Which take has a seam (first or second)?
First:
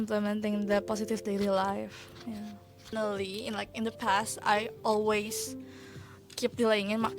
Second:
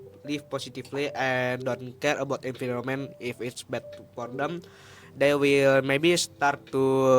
first